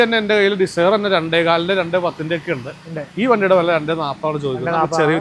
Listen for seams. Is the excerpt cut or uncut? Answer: uncut